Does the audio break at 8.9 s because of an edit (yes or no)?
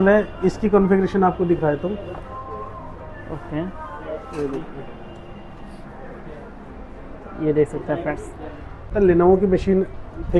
yes